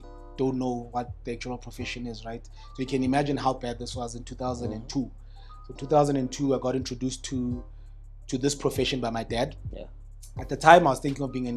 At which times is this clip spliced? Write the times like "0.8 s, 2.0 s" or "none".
none